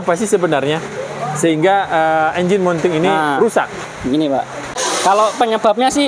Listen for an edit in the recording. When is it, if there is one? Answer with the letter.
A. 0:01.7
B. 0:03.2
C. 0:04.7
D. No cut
C